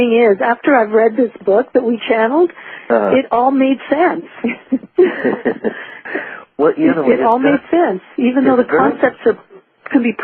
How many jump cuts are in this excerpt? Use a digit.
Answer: 1